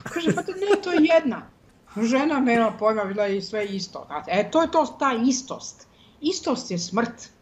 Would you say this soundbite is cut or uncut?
uncut